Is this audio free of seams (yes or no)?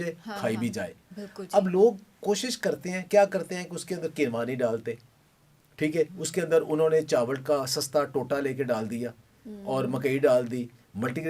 yes